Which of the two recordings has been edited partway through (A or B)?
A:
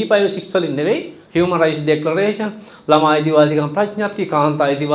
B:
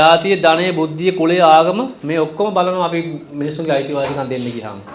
A